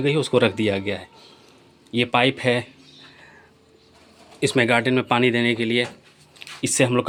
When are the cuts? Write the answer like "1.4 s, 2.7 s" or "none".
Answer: none